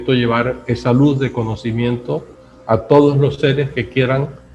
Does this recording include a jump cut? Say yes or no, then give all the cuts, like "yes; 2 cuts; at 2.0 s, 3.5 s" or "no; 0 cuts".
no; 0 cuts